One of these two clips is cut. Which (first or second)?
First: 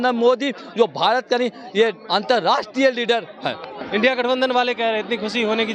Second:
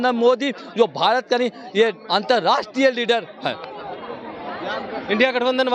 first